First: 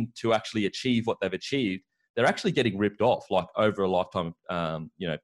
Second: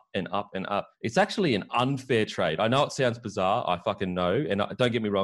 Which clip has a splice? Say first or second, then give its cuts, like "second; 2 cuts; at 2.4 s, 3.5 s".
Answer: second; 1 cut; at 0.9 s